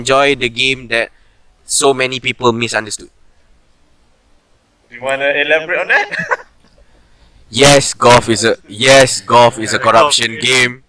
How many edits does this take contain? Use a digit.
0